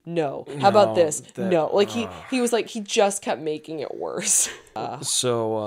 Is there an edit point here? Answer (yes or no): yes